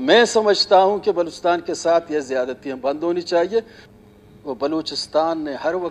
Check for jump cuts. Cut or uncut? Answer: cut